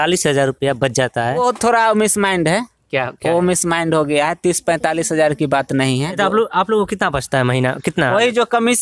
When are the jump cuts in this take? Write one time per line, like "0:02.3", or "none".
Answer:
0:01.4
0:06.2